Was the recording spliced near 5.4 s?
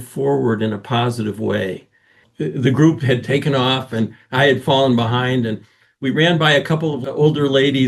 no; 2 cuts; at 2.3 s, 7.0 s

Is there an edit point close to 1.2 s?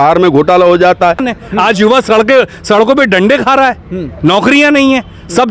yes; 1 cut; at 1.2 s

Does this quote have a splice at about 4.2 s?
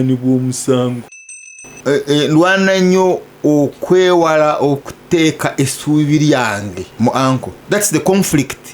no; 3 cuts; at 1.1 s, 6.8 s, 7.5 s

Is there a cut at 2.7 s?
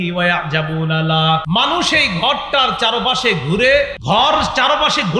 no; 2 cuts; at 1.4 s, 4.0 s

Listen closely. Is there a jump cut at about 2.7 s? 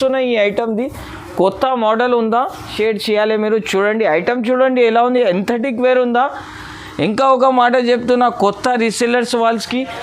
yes; 1 cut; at 2.7 s

